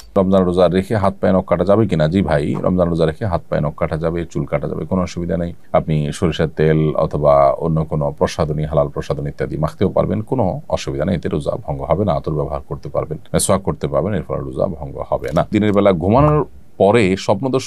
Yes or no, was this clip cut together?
no